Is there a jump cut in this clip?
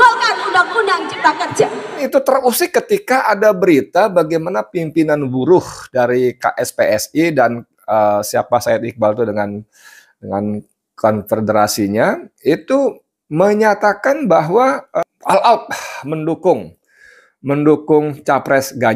yes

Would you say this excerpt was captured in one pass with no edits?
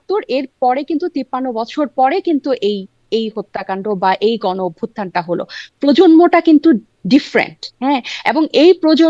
yes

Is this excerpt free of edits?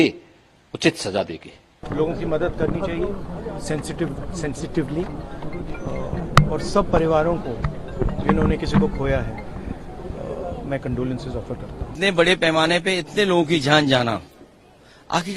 no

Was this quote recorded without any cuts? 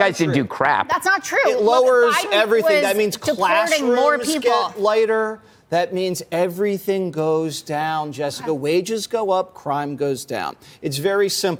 yes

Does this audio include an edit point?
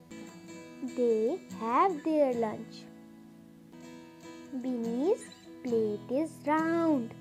no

